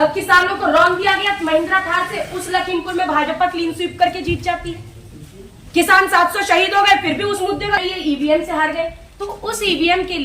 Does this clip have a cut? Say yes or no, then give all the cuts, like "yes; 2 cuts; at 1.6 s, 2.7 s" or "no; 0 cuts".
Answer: yes; 1 cut; at 7.8 s